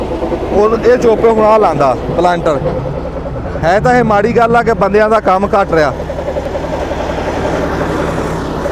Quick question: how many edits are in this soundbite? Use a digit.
0